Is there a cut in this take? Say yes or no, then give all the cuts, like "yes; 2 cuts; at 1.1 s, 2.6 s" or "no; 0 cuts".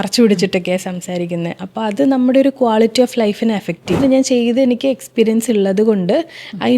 yes; 1 cut; at 3.9 s